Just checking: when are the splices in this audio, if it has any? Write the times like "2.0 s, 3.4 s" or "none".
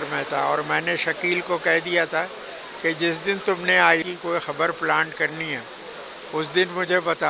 none